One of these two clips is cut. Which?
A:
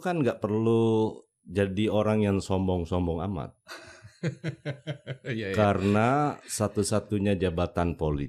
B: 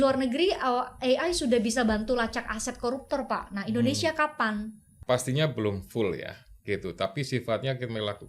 B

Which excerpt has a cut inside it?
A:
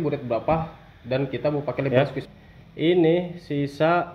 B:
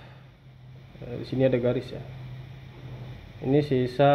A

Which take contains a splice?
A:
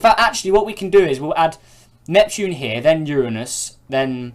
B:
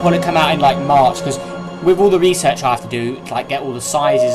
A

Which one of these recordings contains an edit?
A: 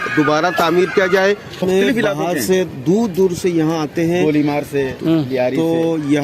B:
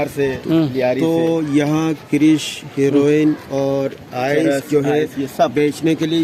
A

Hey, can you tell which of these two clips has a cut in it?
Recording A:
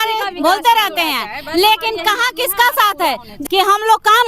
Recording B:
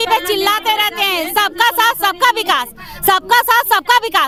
A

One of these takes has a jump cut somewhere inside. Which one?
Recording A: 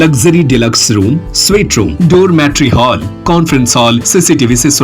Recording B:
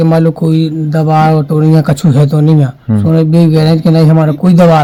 A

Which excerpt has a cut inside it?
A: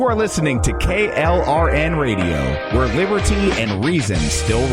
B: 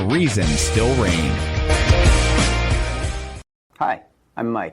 B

